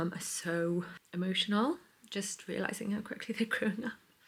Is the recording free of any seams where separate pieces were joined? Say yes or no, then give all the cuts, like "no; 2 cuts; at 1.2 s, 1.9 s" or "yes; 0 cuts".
yes; 0 cuts